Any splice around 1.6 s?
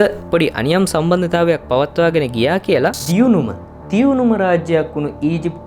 no; 1 cut; at 3.0 s

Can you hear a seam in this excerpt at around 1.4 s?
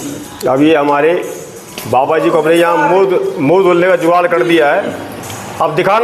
no; 0 cuts

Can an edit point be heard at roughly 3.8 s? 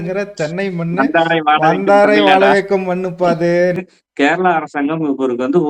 yes; 1 cut; at 3.8 s

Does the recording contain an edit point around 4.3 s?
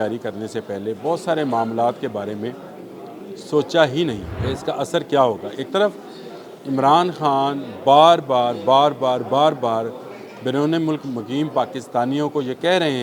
yes; 1 cut; at 4.3 s

